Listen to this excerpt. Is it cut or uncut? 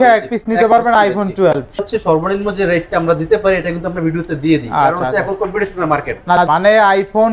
cut